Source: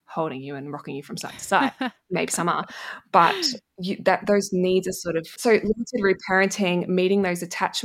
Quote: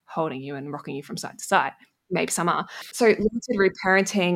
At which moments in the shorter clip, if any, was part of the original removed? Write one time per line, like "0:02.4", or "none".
0:02.9

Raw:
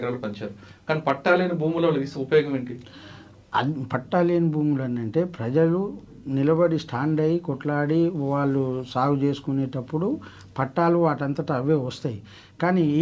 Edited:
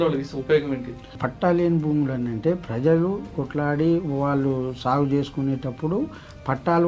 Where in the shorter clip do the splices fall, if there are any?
0:01.2
0:03.4

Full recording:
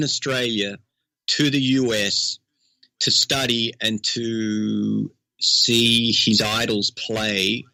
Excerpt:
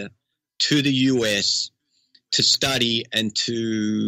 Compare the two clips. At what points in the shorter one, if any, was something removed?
none

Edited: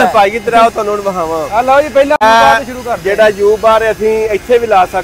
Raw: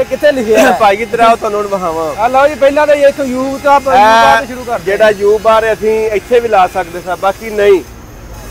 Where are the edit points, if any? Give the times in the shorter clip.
0:02.2

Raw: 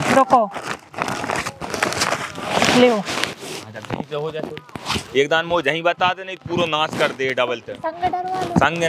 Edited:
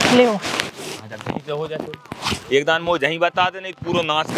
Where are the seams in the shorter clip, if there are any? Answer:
none

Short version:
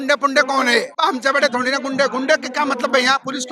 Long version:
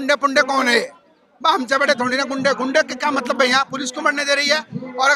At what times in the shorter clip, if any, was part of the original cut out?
0:00.9

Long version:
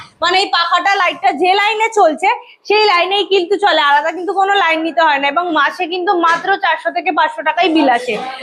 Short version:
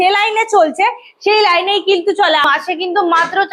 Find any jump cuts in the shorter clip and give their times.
0:02.4

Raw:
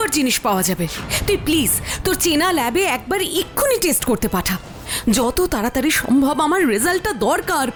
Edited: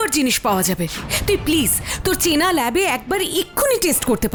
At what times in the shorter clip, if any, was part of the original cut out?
none

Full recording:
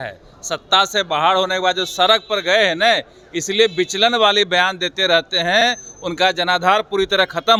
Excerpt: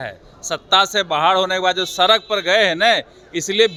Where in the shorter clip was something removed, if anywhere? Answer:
none

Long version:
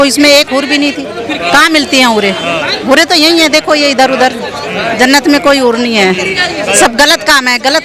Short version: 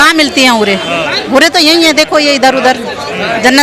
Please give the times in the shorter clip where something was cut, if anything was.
none

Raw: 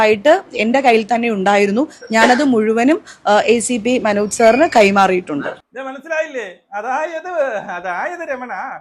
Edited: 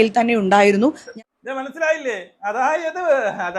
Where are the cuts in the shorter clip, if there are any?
0:01.1

